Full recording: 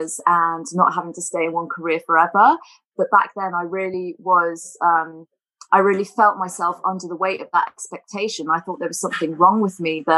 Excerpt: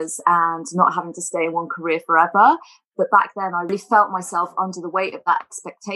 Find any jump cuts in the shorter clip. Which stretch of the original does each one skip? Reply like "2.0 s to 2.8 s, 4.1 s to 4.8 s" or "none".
3.7 s to 6.0 s